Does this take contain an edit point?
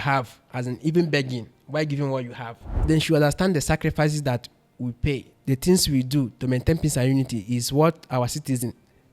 yes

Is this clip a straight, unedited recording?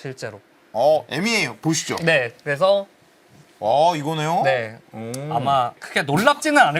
no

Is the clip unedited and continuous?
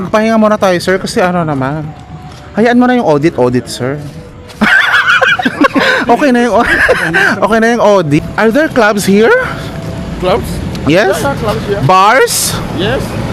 no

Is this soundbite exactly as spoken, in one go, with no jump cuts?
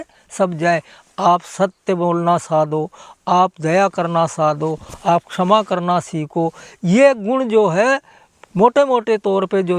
yes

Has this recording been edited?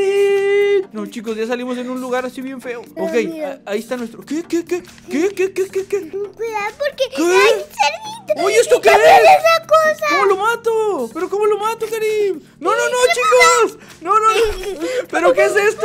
yes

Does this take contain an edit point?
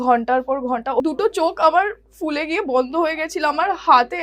yes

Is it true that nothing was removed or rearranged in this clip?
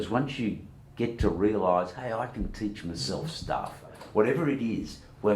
no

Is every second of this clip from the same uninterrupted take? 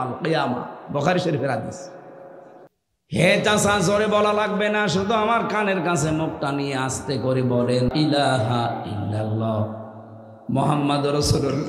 yes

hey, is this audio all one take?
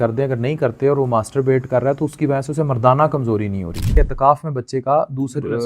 no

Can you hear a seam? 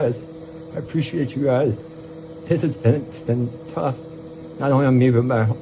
no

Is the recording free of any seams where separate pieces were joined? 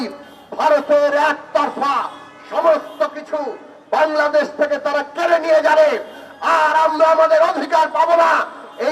yes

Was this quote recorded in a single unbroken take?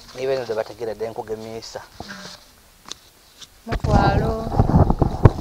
yes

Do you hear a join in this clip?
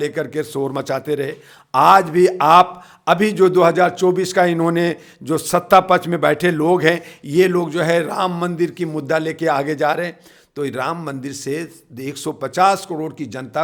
no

